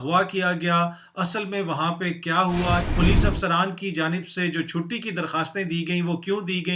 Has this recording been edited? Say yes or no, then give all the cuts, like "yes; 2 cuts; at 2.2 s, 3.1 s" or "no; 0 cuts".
yes; 1 cut; at 2.9 s